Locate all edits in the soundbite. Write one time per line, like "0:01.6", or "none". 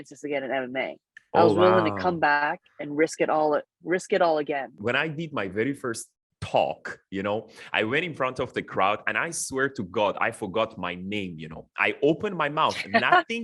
0:04.7

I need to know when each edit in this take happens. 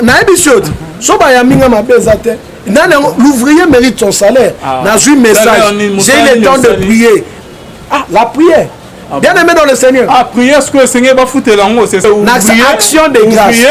0:12.0

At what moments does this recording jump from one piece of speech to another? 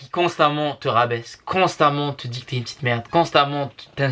none

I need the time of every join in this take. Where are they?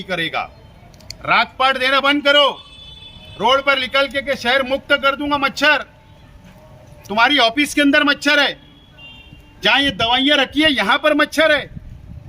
none

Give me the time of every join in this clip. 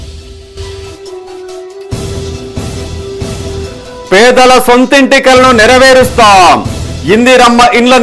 0:03.5

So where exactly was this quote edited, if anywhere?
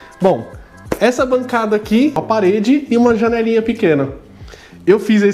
0:02.2

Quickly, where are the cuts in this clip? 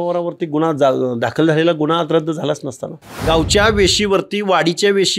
0:03.2

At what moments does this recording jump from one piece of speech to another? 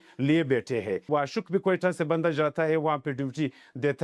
0:01.1

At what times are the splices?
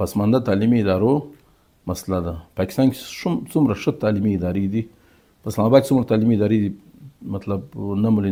none

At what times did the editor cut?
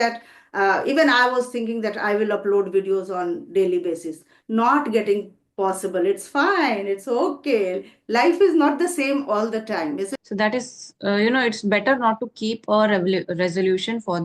0:10.2

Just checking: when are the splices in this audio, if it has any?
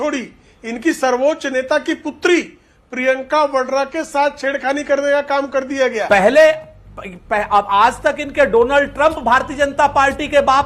0:06.0

